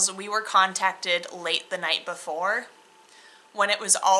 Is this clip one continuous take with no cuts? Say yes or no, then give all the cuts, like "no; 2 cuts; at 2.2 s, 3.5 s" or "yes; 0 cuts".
yes; 0 cuts